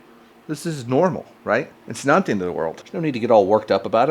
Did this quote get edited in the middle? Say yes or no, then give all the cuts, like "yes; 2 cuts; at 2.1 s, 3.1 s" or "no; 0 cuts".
yes; 1 cut; at 2.7 s